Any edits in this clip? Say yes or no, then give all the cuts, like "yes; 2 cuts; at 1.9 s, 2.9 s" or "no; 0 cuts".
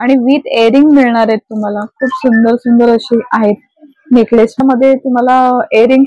yes; 1 cut; at 4.5 s